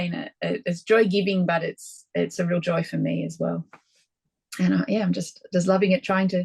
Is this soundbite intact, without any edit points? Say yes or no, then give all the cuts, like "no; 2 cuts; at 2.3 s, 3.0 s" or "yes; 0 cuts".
yes; 0 cuts